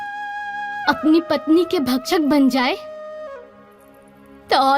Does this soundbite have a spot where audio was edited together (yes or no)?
no